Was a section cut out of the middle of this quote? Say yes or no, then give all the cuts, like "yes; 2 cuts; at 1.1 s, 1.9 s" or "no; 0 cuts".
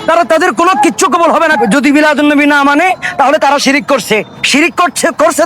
yes; 1 cut; at 1.6 s